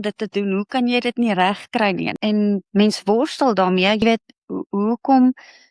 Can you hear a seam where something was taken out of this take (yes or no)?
yes